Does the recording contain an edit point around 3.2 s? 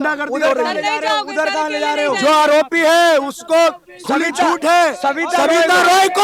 no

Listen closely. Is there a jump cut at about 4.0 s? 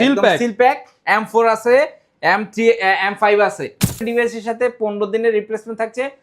yes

